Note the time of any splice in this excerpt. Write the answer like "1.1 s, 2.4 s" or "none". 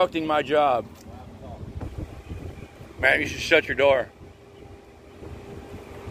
1.8 s